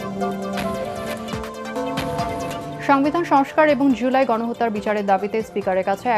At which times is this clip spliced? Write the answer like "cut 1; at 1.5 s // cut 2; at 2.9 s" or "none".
cut 1; at 1.2 s // cut 2; at 2.7 s